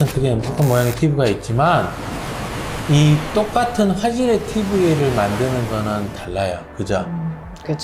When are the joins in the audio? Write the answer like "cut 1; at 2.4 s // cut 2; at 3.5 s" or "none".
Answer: none